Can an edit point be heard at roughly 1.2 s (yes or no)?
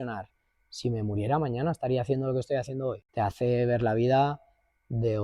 no